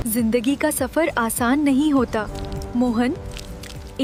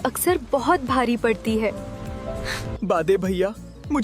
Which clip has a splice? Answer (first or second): second